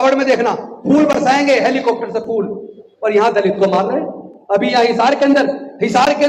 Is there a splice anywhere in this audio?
no; 0 cuts

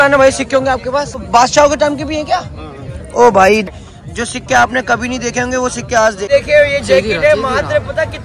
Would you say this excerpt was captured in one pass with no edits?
no; 3 cuts; at 1.2 s, 3.7 s, 6.3 s

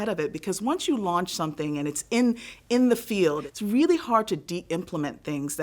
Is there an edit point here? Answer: yes; 1 cut; at 3.5 s

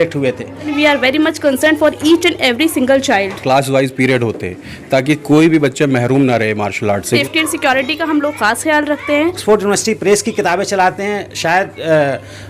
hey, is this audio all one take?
no; 4 cuts; at 0.7 s, 3.3 s, 7.2 s, 9.4 s

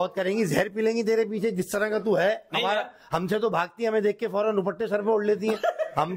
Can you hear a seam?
no; 0 cuts

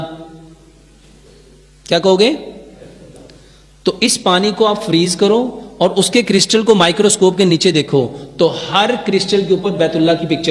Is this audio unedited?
yes; 0 cuts

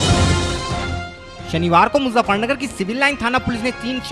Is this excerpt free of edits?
no; 1 cut; at 1.0 s

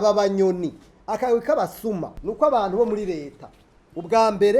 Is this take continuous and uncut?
no; 1 cut; at 2.2 s

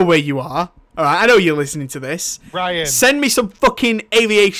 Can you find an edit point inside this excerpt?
no; 0 cuts

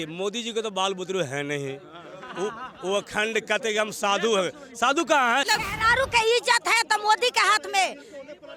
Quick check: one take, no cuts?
no; 1 cut; at 5.5 s

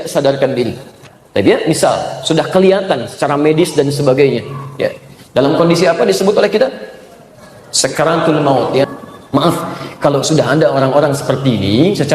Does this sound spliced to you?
yes; 1 cut; at 8.9 s

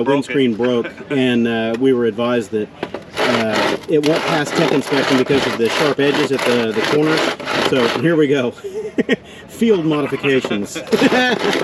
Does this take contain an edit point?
no; 0 cuts

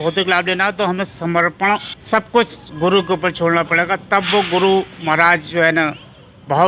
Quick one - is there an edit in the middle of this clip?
yes; 1 cut; at 1.9 s

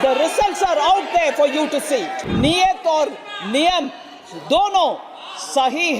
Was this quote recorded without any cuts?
no; 1 cut; at 2.2 s

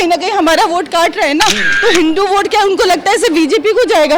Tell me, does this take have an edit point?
yes; 1 cut; at 1.7 s

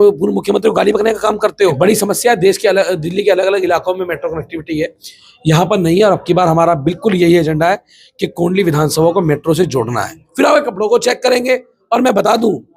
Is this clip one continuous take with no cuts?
no; 2 cuts; at 1.8 s, 10.2 s

